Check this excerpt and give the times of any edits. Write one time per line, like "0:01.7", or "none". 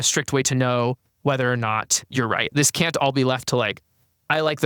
0:02.5